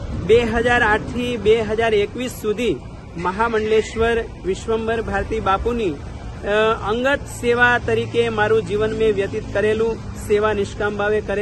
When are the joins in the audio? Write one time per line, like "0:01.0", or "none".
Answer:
none